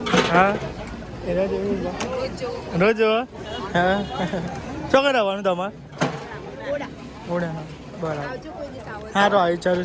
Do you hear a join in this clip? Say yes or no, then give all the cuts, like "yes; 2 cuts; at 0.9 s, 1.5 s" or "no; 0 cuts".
no; 0 cuts